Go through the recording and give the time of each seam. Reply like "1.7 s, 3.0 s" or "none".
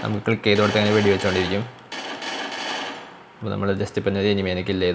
none